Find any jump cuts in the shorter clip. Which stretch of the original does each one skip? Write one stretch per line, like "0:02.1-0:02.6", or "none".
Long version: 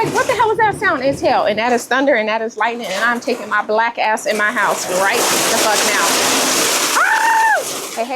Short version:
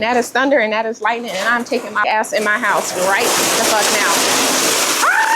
0:03.6-0:03.9